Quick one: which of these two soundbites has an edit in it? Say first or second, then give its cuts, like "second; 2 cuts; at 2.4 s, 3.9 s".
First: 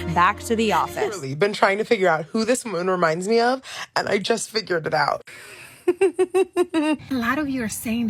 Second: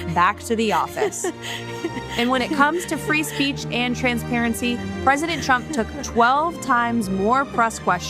first; 2 cuts; at 1.3 s, 7.0 s